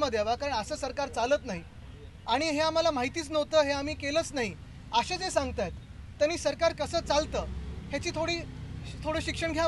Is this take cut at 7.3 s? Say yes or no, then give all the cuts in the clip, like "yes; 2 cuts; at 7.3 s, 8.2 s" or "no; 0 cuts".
no; 0 cuts